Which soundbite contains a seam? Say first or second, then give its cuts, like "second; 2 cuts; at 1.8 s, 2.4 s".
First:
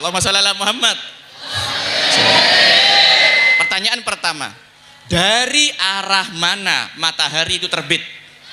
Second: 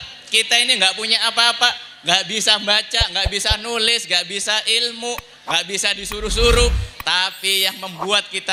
first; 1 cut; at 3.5 s